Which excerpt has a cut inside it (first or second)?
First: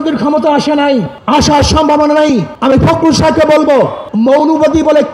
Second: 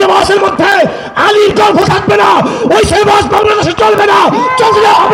first